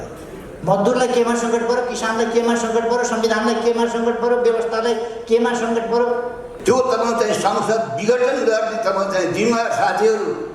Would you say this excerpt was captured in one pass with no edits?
no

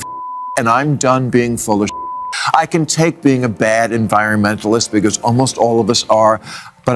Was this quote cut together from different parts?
no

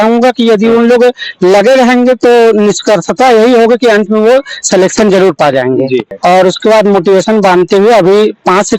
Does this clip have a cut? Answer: yes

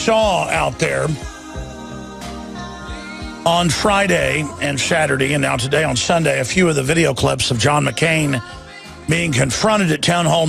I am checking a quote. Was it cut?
no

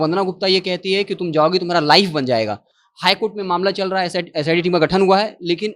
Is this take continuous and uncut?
yes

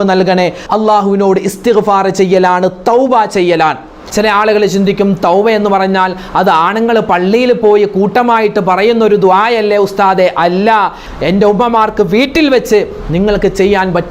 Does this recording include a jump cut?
yes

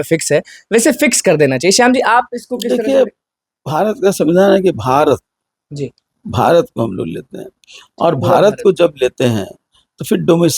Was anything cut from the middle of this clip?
no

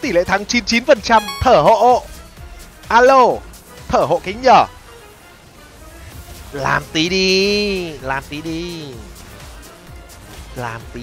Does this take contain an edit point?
no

